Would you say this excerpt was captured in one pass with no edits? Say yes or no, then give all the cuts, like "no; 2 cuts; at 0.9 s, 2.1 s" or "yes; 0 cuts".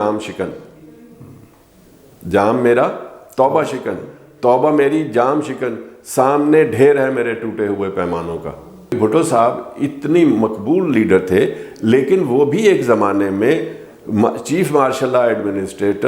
no; 1 cut; at 9.0 s